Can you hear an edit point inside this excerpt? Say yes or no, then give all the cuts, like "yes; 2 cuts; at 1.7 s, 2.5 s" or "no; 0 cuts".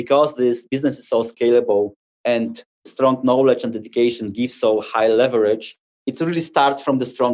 yes; 1 cut; at 2.3 s